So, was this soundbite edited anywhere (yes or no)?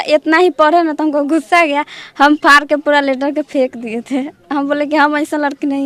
no